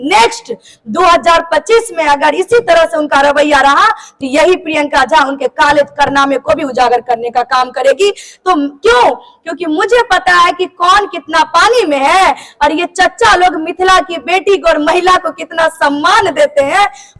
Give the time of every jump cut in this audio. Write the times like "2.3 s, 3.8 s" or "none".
none